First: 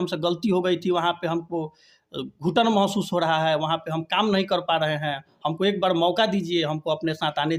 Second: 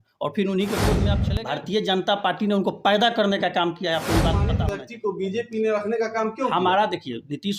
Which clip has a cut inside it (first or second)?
second